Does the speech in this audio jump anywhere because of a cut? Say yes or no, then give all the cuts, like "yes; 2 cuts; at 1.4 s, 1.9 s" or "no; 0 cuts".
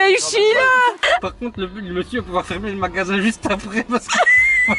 yes; 1 cut; at 1.0 s